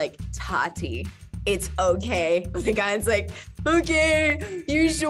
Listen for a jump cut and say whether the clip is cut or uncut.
cut